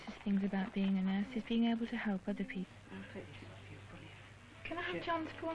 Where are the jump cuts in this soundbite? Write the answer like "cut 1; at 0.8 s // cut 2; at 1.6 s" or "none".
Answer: none